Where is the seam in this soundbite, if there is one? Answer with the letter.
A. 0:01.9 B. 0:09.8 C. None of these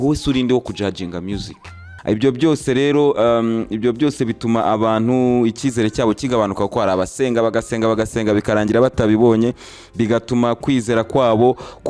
A